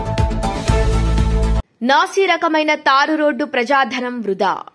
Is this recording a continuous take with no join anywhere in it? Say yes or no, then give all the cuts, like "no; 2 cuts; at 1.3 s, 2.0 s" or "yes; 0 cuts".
yes; 0 cuts